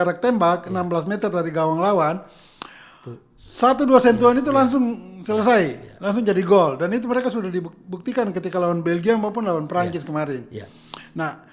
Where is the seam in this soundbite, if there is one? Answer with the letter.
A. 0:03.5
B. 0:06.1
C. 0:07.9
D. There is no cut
D